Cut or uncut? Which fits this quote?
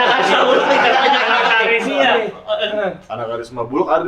cut